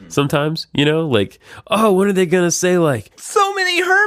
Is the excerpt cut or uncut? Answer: cut